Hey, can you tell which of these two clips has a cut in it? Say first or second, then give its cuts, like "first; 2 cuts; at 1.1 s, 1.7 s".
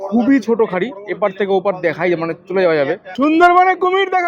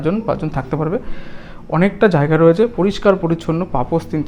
first; 1 cut; at 3.1 s